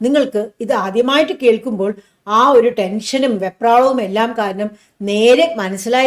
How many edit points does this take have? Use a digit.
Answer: 0